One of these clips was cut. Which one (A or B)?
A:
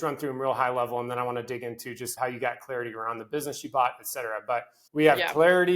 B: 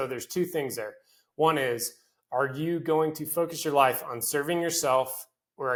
A